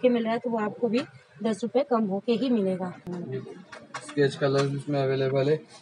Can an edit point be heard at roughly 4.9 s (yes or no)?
no